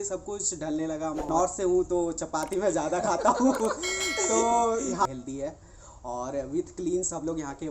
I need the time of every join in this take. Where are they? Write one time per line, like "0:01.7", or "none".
0:01.3
0:05.1